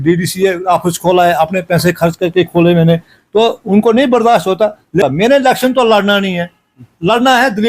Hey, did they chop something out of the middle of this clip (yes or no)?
yes